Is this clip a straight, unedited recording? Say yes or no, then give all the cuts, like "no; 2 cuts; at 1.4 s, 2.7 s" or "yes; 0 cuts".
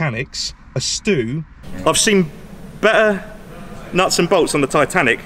no; 1 cut; at 1.6 s